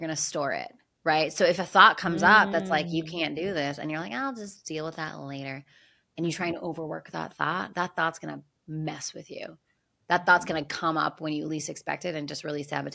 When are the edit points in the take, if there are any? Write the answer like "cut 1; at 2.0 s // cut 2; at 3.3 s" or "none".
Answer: cut 1; at 1.6 s